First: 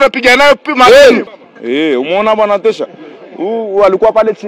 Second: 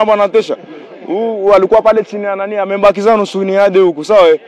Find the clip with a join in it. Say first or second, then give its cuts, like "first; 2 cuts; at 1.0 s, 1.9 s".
first; 1 cut; at 1.4 s